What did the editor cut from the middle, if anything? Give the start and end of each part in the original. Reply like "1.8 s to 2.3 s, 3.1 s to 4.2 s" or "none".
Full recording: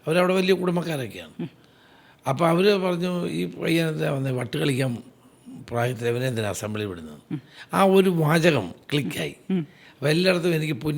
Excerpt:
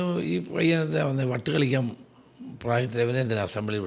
none